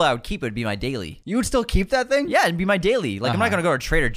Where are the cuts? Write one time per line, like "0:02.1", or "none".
0:01.1